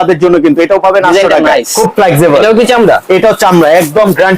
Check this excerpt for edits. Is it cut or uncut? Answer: cut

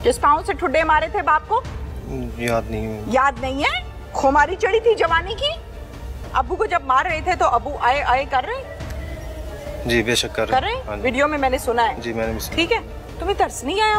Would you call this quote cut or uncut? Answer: cut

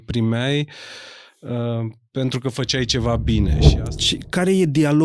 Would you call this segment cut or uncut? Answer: cut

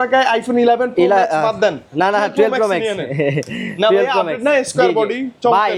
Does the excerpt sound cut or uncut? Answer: uncut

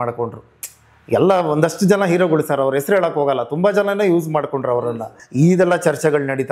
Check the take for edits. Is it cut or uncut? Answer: cut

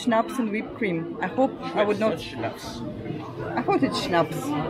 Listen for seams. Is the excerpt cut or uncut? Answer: uncut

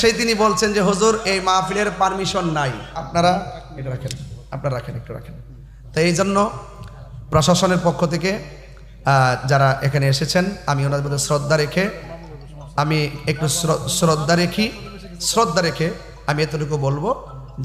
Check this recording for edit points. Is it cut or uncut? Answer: cut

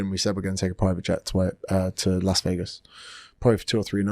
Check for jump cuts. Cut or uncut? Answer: uncut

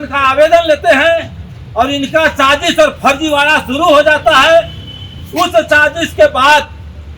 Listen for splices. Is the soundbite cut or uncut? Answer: uncut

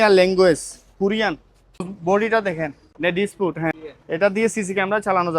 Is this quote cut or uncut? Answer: cut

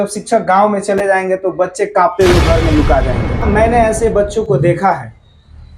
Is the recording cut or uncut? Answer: cut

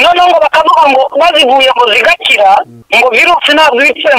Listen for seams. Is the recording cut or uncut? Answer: cut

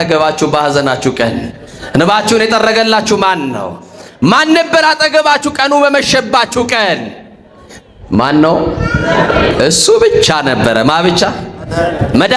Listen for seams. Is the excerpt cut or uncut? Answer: uncut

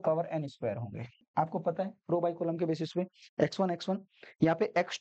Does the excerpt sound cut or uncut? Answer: cut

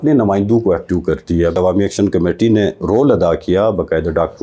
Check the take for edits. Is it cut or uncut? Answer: cut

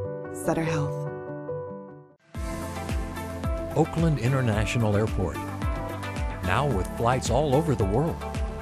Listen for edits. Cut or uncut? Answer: cut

